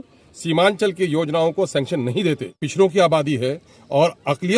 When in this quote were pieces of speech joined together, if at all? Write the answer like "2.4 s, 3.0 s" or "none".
2.6 s